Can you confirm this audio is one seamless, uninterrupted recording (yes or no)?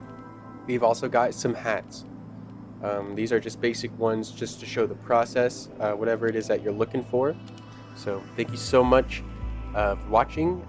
no